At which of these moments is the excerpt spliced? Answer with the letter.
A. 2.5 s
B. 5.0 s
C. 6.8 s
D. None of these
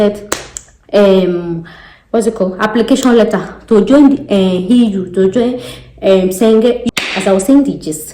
C